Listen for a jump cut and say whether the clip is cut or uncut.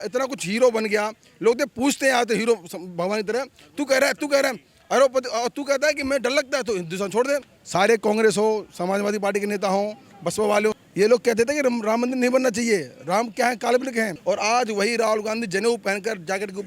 cut